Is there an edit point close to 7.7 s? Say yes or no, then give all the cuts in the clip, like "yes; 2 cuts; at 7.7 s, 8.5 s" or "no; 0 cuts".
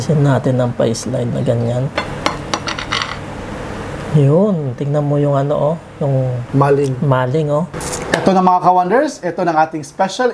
yes; 1 cut; at 7.7 s